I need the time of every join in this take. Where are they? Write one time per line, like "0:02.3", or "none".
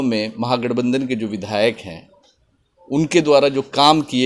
none